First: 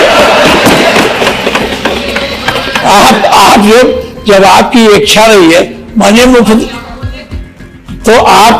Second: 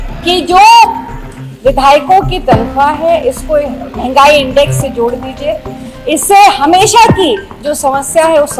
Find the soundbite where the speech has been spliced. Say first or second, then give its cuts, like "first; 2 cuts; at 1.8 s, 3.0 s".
first; 1 cut; at 2.7 s